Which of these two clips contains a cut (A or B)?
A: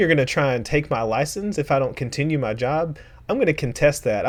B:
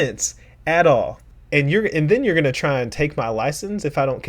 B